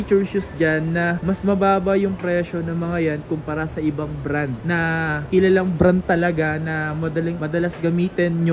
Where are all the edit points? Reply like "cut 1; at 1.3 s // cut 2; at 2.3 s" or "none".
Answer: none